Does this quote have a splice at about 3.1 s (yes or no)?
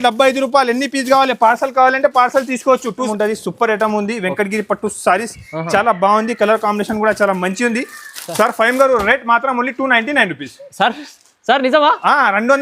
yes